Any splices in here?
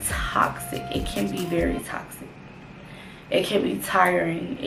no; 0 cuts

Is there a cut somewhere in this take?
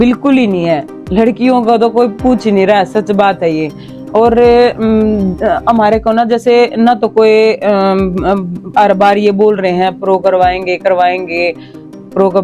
no; 0 cuts

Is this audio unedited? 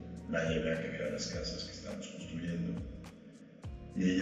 yes; 0 cuts

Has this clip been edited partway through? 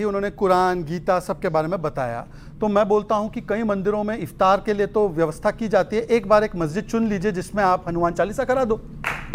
no; 0 cuts

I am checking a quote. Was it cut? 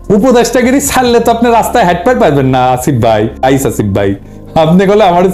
yes; 1 cut; at 3.4 s

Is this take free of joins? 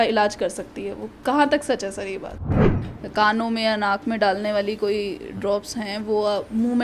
no; 1 cut; at 2.6 s

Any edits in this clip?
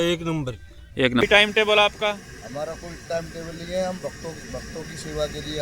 yes; 1 cut; at 1.2 s

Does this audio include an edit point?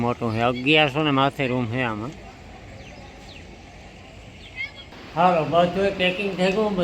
yes; 1 cut; at 4.9 s

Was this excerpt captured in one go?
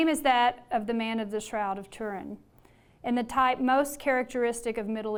yes; 0 cuts

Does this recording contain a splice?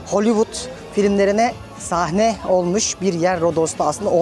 no; 0 cuts

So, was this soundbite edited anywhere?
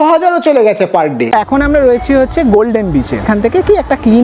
yes; 2 cuts; at 1.2 s, 3.2 s

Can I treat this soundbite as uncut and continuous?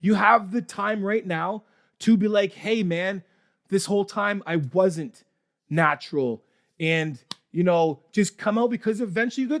yes; 0 cuts

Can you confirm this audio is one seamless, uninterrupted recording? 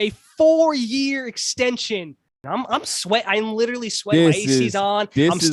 no; 1 cut; at 2.3 s

